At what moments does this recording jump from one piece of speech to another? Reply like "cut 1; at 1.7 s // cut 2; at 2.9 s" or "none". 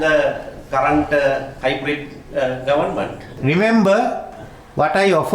cut 1; at 1.5 s // cut 2; at 3.3 s